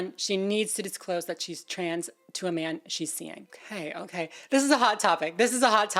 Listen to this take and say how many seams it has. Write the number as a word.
zero